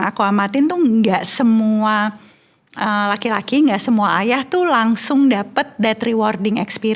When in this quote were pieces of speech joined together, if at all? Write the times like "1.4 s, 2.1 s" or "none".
none

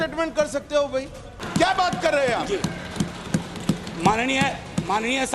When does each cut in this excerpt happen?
1.4 s

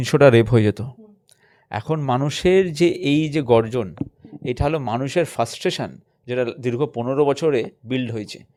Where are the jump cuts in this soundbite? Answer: none

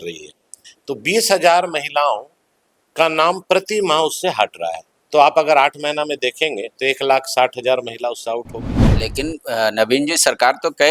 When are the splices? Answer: 8.9 s

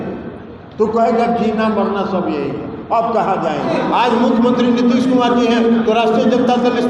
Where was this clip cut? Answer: 3.7 s

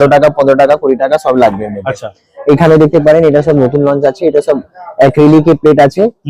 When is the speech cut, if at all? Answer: none

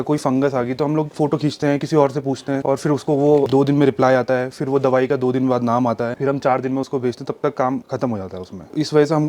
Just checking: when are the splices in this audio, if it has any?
none

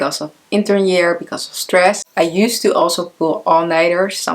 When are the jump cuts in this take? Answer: 2.0 s

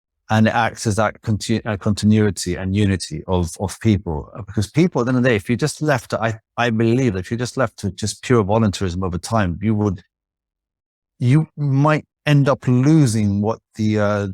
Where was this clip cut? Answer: none

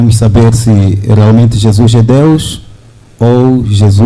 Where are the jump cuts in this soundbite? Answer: none

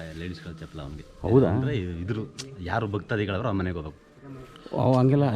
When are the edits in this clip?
none

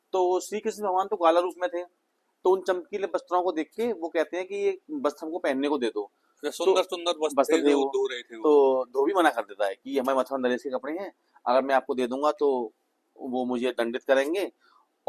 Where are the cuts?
none

